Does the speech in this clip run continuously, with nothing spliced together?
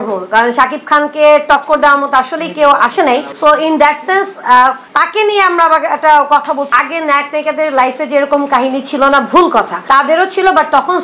no; 2 cuts; at 6.7 s, 9.8 s

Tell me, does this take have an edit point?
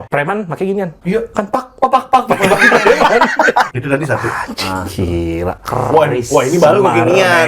yes; 1 cut; at 3.7 s

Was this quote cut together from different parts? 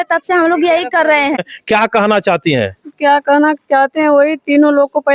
yes; 1 cut; at 1.4 s

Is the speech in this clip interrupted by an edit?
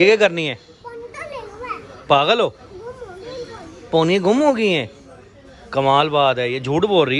no; 0 cuts

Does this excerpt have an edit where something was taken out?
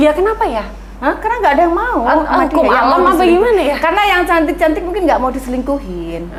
no; 0 cuts

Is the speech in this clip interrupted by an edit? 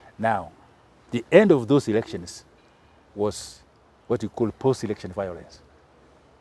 no; 0 cuts

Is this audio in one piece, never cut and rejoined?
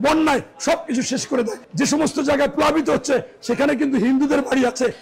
no; 1 cut; at 1.6 s

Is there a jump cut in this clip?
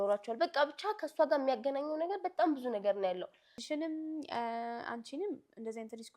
yes; 1 cut; at 3.5 s

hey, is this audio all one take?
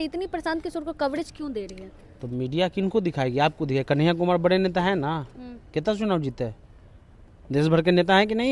yes; 0 cuts

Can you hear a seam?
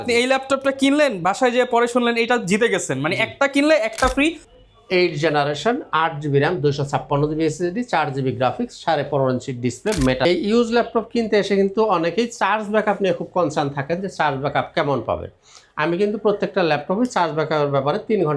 yes; 2 cuts; at 4.4 s, 10.2 s

